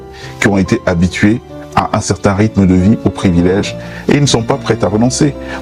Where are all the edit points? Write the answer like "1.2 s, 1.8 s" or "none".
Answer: none